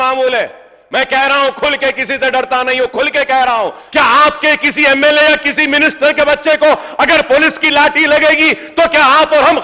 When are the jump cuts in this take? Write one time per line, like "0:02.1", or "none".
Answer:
0:03.8

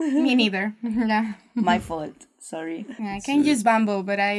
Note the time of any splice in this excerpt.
0:03.0

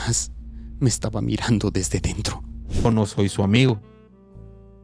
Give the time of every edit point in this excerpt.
0:02.9

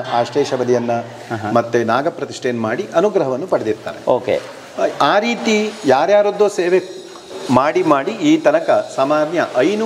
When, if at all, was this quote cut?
none

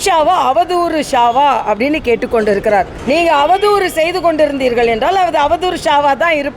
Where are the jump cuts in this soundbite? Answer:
none

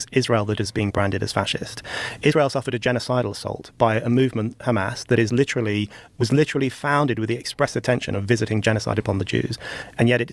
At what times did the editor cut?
none

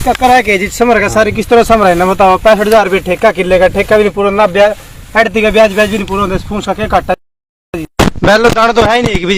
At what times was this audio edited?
none

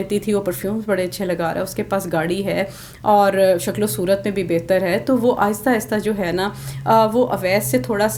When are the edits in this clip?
none

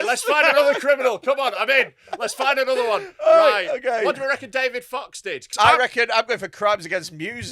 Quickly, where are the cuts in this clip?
0:05.5

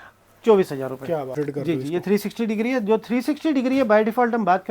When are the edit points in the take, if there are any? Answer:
0:01.4

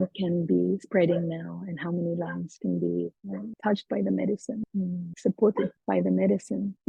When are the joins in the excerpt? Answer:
none

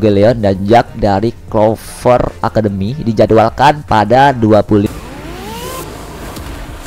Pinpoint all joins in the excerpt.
0:04.9

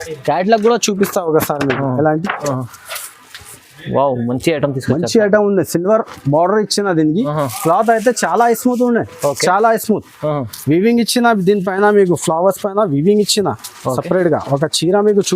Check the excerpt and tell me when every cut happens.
0:02.4

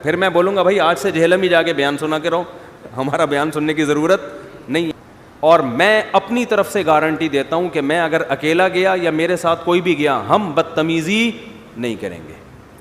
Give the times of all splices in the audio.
0:05.0

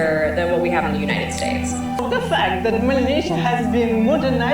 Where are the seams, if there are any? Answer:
0:02.0

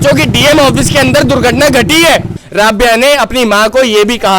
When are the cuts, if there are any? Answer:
0:02.4

